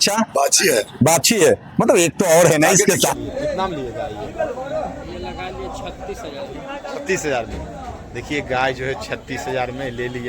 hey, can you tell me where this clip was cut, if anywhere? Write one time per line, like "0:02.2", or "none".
0:03.1

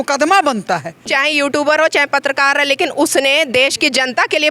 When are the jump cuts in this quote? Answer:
0:01.0

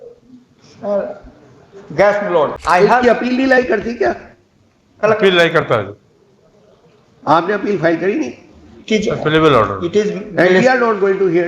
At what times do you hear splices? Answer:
0:02.6

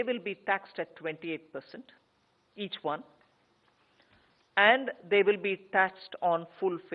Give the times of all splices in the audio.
0:05.4

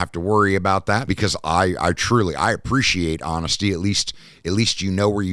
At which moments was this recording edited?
0:01.1

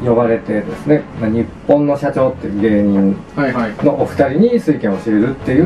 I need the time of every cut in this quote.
0:01.1

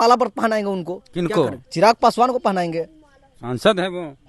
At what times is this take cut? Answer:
none

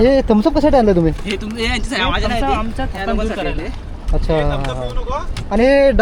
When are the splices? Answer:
none

